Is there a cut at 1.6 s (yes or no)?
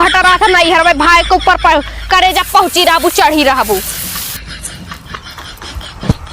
no